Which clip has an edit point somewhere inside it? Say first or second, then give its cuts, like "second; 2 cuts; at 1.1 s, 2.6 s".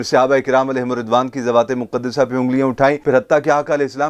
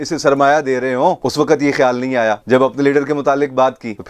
first; 1 cut; at 3.0 s